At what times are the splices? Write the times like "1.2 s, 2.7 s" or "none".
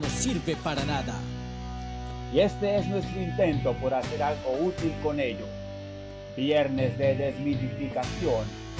none